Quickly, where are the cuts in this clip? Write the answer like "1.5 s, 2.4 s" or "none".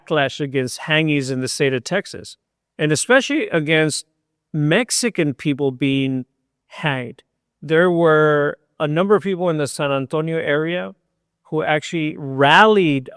none